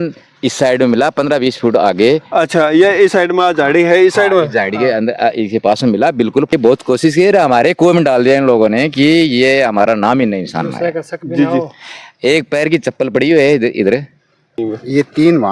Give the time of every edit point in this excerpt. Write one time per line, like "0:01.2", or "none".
0:06.5
0:14.6